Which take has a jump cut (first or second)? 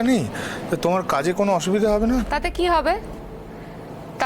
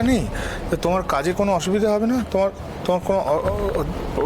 first